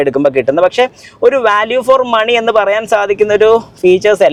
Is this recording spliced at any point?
no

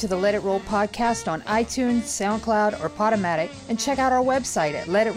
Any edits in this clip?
no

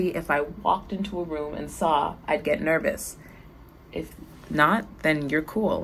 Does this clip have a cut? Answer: no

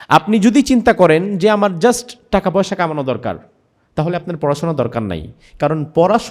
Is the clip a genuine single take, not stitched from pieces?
yes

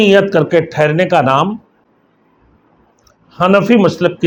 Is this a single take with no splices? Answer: yes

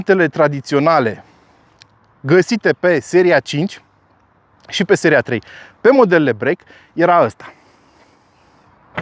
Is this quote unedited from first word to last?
yes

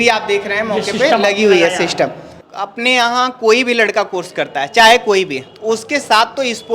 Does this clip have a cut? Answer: yes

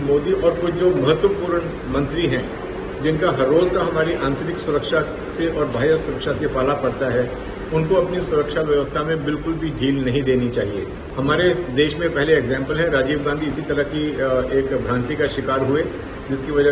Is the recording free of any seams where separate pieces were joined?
no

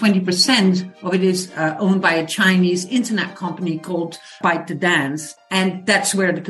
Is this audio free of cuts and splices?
no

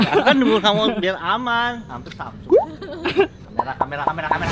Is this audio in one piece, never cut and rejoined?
no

